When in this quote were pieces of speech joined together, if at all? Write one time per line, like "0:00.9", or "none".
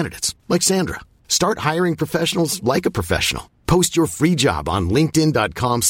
none